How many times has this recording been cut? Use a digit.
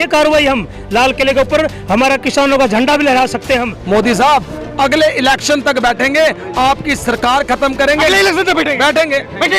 1